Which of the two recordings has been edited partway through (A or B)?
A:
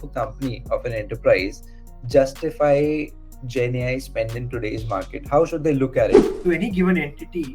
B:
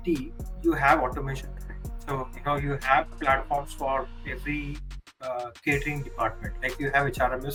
A